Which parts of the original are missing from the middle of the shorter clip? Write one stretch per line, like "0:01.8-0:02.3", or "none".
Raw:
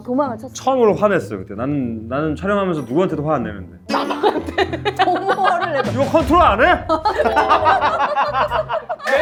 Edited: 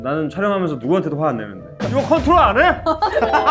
0:03.9-0:05.8